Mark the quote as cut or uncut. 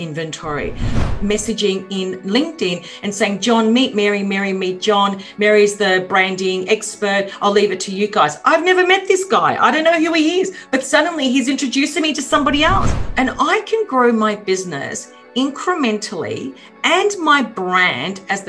cut